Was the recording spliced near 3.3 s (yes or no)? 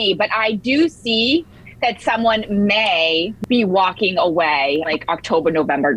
yes